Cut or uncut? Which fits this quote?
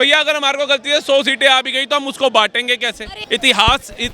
cut